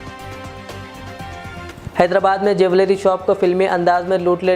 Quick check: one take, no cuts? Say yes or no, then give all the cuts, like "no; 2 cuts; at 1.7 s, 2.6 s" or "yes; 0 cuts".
no; 1 cut; at 1.7 s